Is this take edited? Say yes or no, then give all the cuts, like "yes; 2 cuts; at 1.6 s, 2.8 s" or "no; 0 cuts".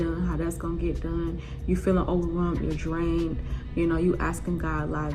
no; 0 cuts